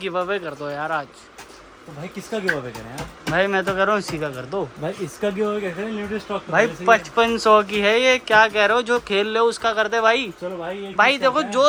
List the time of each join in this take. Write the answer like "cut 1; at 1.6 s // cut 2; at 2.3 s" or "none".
none